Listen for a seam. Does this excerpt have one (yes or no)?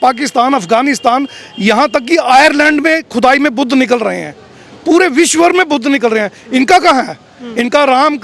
no